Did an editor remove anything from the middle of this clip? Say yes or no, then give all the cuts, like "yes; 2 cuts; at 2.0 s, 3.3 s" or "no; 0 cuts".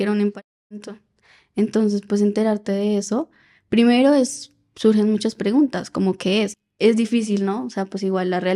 yes; 1 cut; at 6.5 s